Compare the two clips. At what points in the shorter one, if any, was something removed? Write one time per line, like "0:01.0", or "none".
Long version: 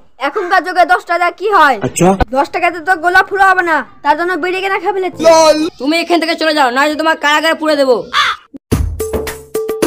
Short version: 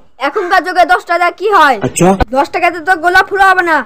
none

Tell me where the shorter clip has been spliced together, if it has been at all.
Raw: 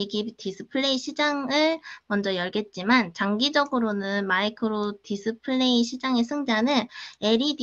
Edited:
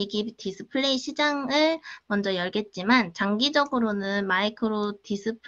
none

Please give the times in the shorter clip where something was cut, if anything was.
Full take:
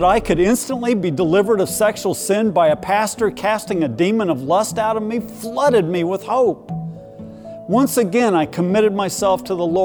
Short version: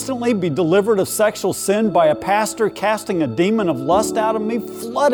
none

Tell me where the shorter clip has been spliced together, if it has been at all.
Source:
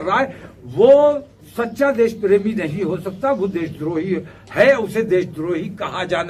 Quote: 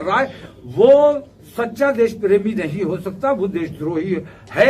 none

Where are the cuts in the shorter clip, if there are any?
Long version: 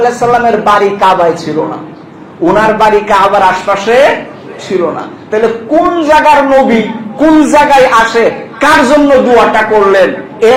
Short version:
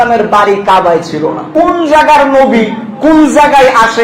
0:01.4

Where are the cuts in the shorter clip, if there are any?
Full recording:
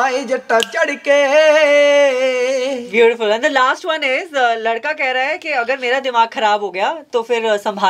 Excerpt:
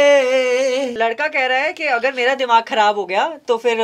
0:01.0

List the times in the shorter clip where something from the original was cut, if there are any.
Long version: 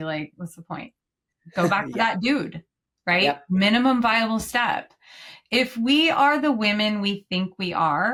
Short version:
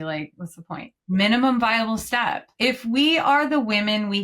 0:01.0
0:02.5

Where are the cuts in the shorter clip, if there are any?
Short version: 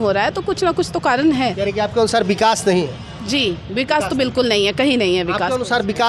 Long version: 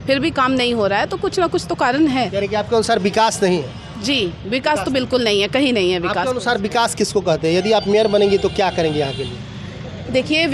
none

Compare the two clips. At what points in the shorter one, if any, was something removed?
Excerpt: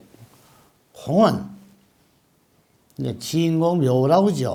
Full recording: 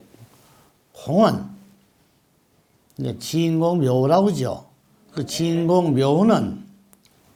none

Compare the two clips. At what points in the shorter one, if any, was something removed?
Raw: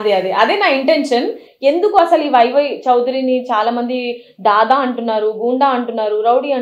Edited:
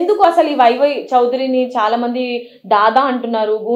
none

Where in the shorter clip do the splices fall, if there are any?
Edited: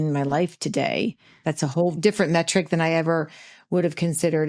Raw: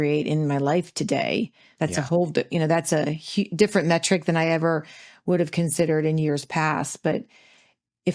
0:01.9

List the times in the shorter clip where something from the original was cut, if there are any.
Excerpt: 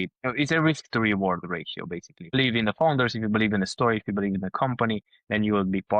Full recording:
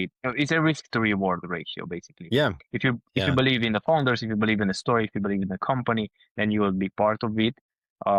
0:02.3

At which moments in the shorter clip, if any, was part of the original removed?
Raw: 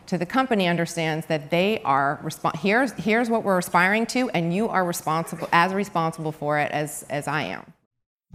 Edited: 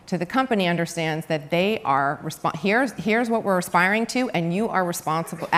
none

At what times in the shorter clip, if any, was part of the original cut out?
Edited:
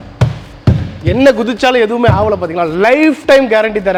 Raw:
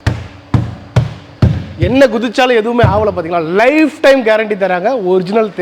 none

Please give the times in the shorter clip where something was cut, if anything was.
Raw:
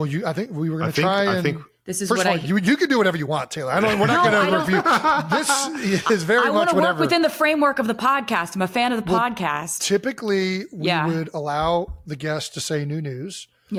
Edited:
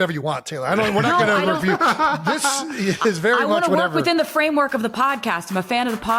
none

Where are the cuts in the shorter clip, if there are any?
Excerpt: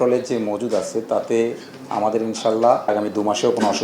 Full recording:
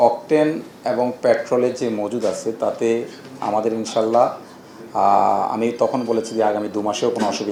0:02.9

